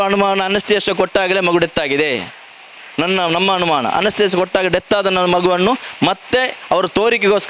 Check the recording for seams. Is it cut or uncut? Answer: uncut